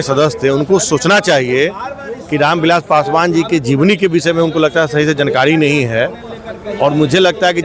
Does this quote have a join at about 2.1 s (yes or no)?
no